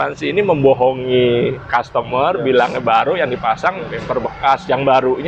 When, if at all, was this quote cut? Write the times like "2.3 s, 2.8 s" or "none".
none